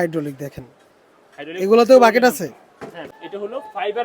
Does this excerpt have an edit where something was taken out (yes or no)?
yes